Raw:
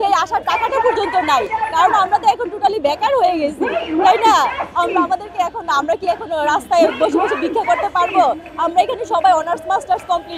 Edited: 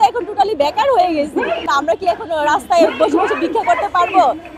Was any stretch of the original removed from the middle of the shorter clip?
yes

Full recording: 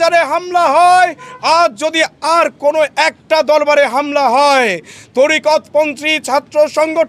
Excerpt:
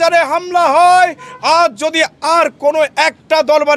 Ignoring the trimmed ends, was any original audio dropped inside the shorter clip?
no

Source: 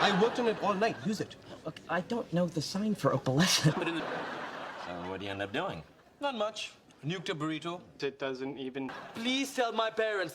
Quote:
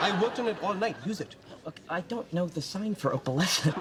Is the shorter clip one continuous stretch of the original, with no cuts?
yes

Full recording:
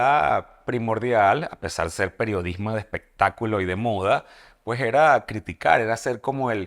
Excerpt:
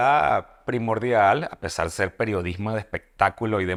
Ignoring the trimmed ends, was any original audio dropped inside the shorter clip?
no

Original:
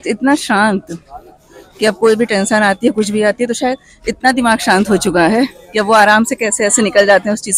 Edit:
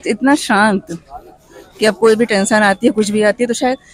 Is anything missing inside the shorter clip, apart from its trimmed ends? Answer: no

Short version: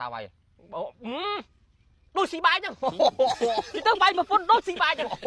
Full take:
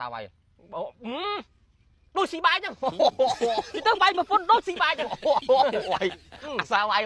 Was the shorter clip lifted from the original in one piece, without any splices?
yes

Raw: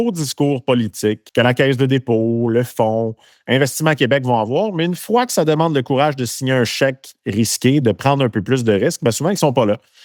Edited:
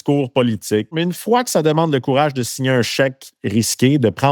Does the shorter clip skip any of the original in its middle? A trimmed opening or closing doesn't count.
yes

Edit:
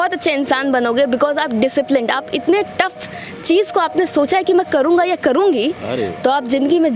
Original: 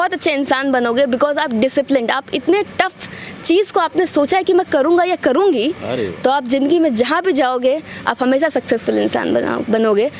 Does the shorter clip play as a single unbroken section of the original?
yes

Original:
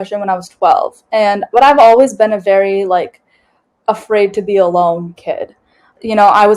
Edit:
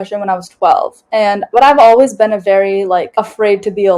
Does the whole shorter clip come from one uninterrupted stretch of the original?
no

